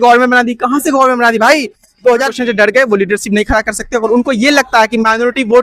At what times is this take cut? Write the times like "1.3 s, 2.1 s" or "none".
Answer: 2.3 s